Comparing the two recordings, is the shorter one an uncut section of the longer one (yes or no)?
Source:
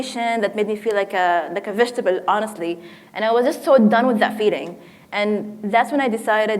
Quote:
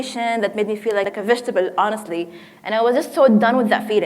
no